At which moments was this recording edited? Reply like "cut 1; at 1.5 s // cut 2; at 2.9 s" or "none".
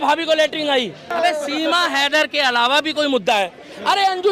cut 1; at 1.1 s